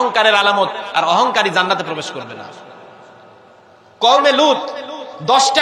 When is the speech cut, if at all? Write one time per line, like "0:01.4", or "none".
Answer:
0:03.4